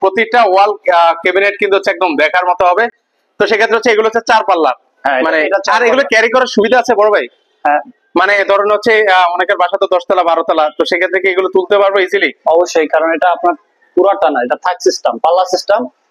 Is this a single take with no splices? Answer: yes; 0 cuts

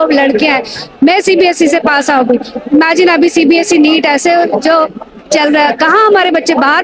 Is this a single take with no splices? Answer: yes; 0 cuts

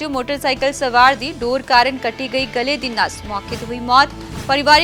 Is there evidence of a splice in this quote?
no; 0 cuts

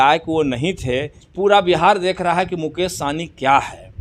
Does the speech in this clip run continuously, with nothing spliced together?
no; 1 cut; at 1.2 s

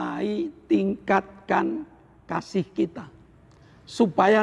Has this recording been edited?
no; 0 cuts

